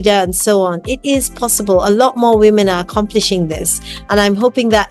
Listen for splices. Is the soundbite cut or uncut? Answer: uncut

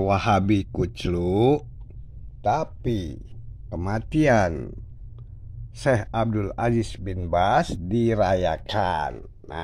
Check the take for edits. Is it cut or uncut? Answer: uncut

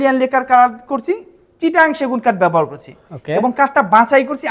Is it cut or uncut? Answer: uncut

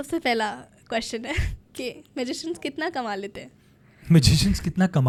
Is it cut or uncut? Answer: uncut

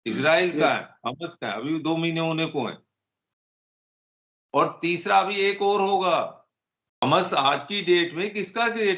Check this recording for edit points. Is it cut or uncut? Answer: cut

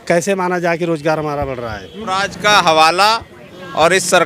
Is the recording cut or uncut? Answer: cut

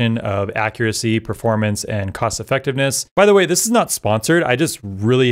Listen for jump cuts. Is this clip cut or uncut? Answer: cut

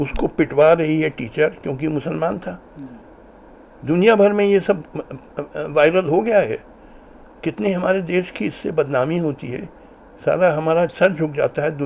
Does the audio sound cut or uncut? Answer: uncut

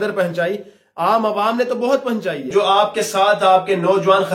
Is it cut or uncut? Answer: cut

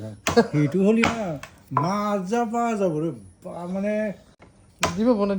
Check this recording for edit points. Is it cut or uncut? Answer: uncut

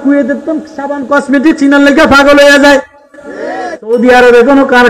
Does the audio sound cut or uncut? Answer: cut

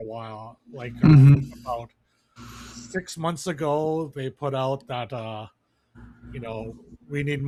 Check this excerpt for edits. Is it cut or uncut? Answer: uncut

